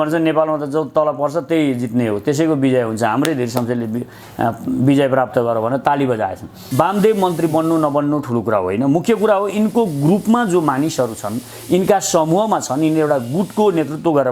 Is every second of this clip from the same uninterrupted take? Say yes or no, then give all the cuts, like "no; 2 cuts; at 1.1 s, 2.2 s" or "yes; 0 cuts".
no; 1 cut; at 6.5 s